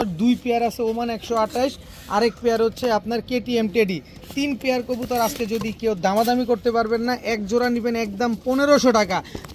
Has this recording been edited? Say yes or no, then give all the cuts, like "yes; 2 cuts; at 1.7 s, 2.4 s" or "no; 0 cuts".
no; 0 cuts